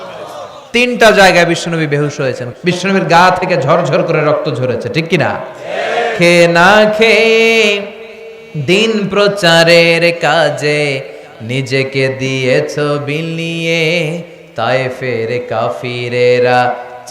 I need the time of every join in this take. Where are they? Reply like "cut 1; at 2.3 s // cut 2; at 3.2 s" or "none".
cut 1; at 2.4 s

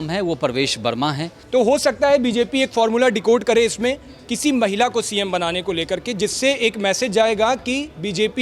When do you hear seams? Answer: cut 1; at 1.4 s

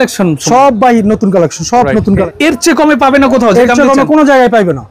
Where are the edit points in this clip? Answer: cut 1; at 2.3 s

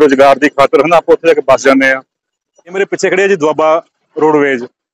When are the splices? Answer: cut 1; at 2.8 s

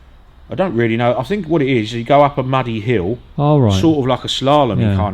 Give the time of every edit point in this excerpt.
cut 1; at 3.3 s

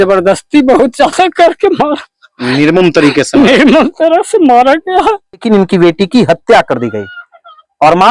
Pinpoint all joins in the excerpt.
cut 1; at 5.4 s

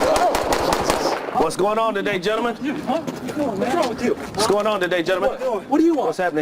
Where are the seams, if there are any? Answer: cut 1; at 1.3 s

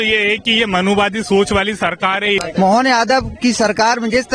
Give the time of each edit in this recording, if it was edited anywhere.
cut 1; at 2.4 s

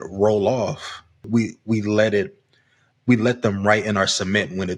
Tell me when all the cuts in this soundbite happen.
cut 1; at 1.2 s

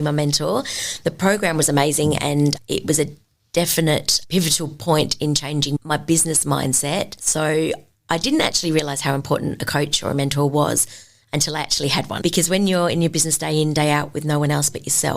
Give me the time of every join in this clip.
cut 1; at 5.8 s

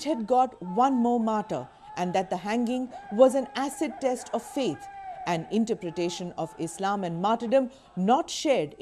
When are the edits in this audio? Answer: cut 1; at 4.0 s

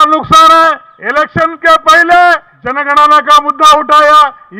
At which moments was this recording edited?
cut 1; at 0.9 s // cut 2; at 2.8 s

